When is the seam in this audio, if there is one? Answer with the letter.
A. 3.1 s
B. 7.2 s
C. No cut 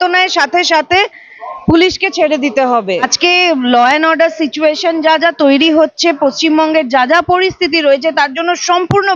A